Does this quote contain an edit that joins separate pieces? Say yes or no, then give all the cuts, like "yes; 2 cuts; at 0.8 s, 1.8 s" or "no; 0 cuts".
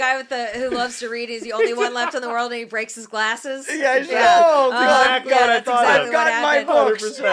no; 0 cuts